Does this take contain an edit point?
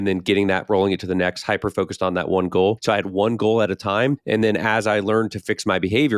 yes; 2 cuts; at 2.8 s, 4.2 s

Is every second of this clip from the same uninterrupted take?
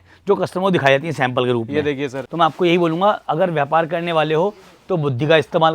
no; 1 cut; at 2.2 s

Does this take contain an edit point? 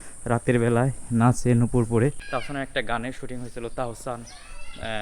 yes; 1 cut; at 2.3 s

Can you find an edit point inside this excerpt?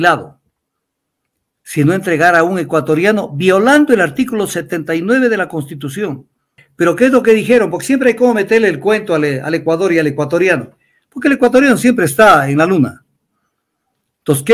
yes; 1 cut; at 6.6 s

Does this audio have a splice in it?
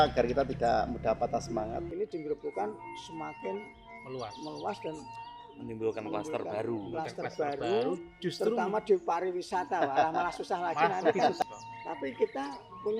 yes; 2 cuts; at 1.9 s, 11.4 s

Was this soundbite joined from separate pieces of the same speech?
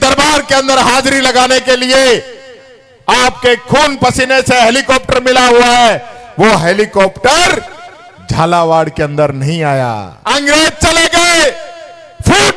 yes; 1 cut; at 10.1 s

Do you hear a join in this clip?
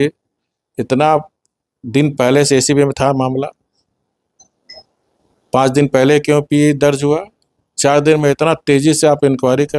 no; 0 cuts

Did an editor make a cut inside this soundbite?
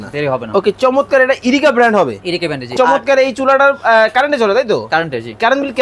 yes; 1 cut; at 2.7 s

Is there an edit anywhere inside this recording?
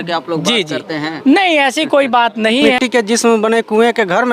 yes; 1 cut; at 2.7 s

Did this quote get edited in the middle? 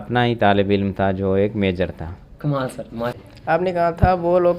yes; 1 cut; at 3.1 s

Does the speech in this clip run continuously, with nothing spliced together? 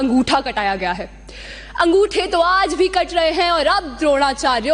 yes; 0 cuts

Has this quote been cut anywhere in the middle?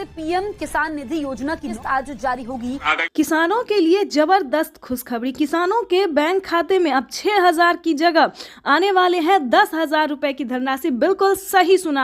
yes; 1 cut; at 2.9 s

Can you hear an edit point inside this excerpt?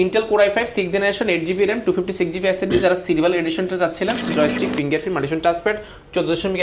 yes; 1 cut; at 4.3 s

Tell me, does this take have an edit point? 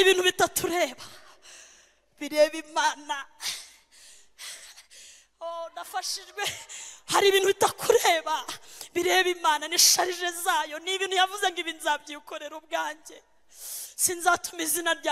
no; 0 cuts

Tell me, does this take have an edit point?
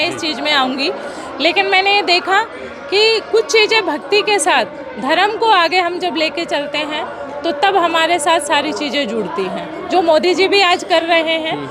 no; 0 cuts

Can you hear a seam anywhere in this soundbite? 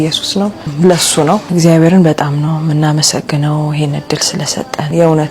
yes; 1 cut; at 1.5 s

